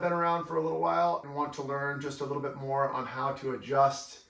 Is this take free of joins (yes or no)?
no